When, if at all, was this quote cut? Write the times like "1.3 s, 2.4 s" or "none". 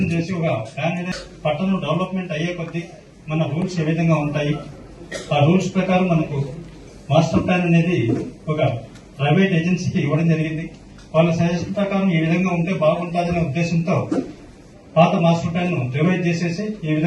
1.1 s